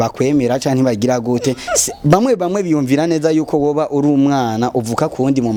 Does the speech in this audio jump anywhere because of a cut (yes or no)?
no